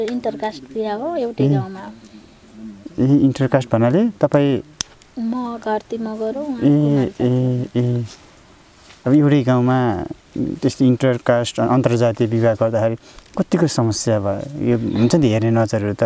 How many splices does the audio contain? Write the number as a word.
zero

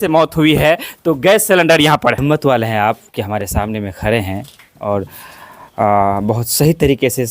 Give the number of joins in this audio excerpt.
one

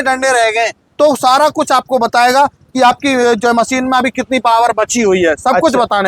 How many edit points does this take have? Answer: zero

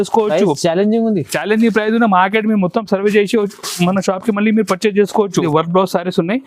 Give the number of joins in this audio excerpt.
one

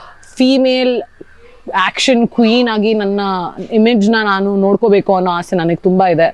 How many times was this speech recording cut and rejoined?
zero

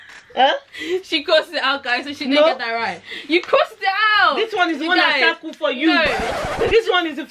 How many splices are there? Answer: zero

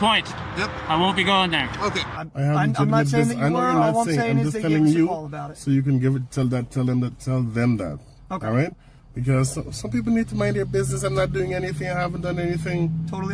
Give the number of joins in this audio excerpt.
one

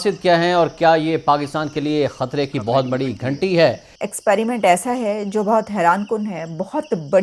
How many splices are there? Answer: one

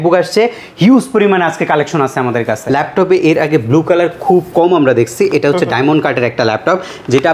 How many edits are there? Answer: one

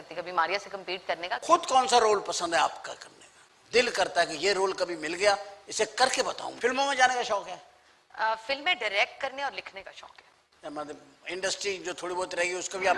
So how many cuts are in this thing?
one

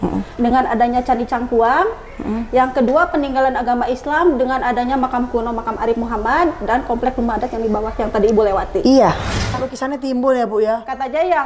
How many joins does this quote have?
one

